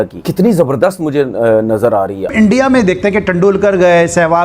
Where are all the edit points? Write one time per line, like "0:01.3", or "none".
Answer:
0:02.3